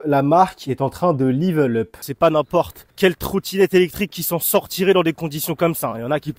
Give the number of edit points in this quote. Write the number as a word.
two